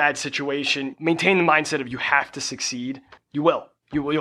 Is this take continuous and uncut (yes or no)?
no